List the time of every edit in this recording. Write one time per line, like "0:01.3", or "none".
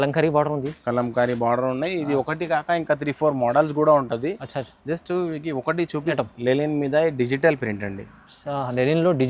0:06.1